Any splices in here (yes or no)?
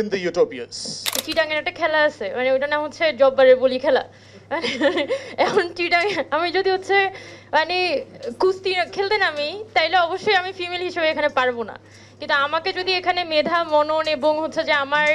yes